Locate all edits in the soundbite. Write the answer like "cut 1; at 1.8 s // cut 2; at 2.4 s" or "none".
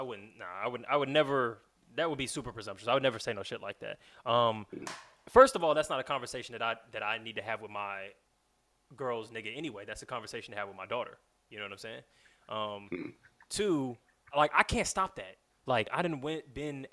cut 1; at 14.3 s // cut 2; at 15.9 s